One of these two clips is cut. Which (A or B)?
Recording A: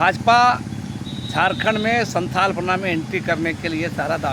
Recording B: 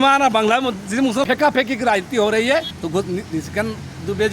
B